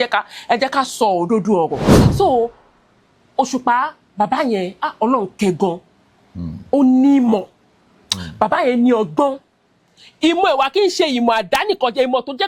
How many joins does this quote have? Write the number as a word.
one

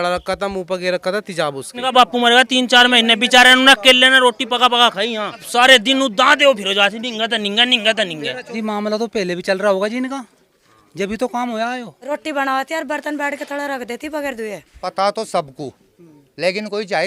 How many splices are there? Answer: five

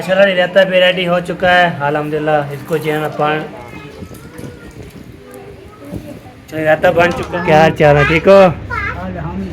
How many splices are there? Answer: two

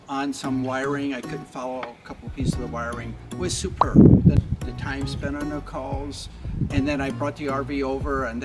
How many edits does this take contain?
one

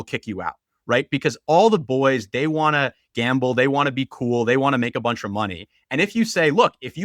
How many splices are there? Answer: zero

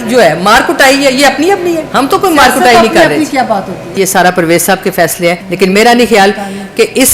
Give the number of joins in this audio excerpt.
three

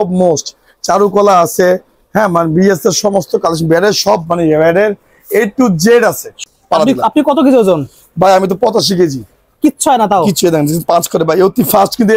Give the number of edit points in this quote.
one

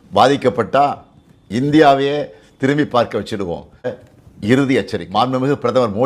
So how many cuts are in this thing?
two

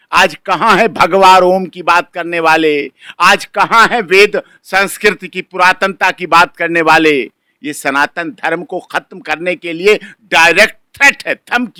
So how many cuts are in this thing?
zero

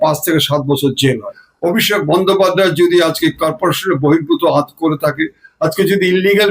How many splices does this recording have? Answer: one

